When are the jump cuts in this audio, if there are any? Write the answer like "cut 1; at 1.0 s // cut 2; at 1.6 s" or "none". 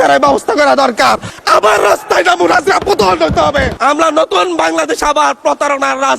cut 1; at 1.3 s // cut 2; at 3.7 s